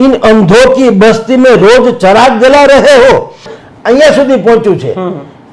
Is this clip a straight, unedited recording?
no; 1 cut; at 3.5 s

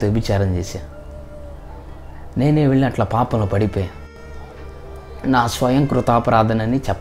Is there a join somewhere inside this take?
no; 0 cuts

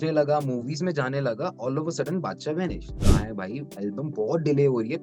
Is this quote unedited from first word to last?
no; 1 cut; at 3.0 s

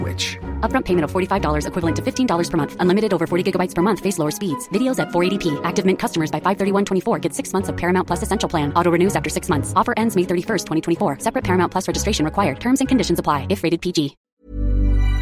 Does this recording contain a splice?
yes; 1 cut; at 14.2 s

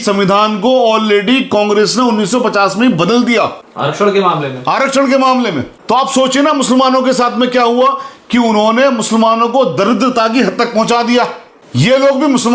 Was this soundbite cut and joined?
no; 0 cuts

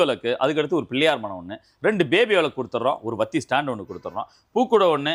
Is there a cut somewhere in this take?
no; 0 cuts

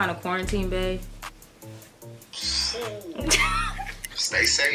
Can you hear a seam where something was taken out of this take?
no; 0 cuts

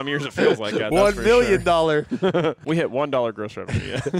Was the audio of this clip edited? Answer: yes; 1 cut; at 2.6 s

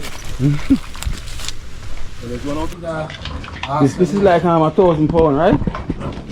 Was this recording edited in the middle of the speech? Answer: yes; 1 cut; at 2.7 s

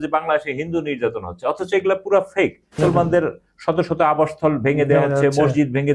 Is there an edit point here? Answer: yes; 1 cut; at 2.7 s

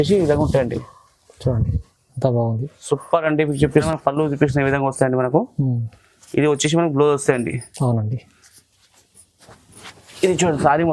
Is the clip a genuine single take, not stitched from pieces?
no; 1 cut; at 3.9 s

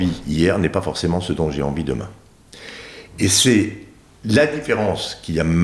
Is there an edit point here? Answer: no; 0 cuts

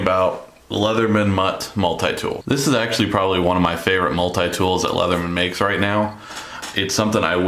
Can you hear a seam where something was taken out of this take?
no; 0 cuts

